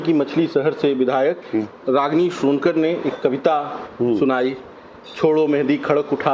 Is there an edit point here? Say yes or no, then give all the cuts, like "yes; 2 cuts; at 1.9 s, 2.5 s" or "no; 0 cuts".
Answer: no; 0 cuts